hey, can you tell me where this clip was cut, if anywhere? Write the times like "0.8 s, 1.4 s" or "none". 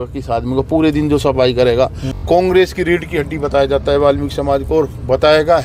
2.2 s